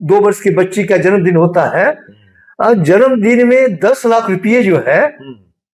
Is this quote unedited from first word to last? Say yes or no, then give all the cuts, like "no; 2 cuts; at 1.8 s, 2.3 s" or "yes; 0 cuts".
yes; 0 cuts